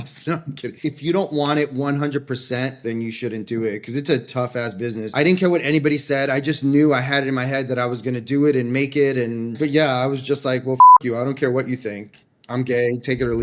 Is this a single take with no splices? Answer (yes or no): no